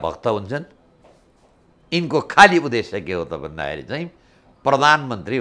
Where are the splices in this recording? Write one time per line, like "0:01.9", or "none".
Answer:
none